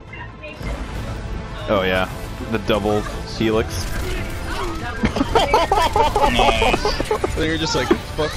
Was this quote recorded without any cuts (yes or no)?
yes